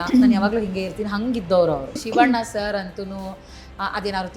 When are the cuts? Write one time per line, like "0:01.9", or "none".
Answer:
0:02.0